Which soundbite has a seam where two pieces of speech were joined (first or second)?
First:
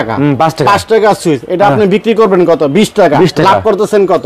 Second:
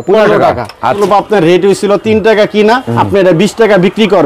second